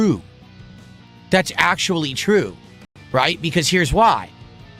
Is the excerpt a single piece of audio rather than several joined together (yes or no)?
yes